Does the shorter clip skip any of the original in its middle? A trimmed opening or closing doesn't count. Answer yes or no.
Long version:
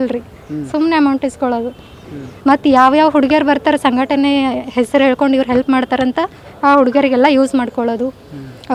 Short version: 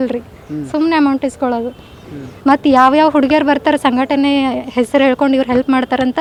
no